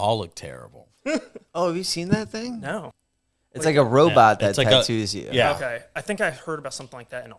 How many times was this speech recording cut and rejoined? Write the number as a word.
one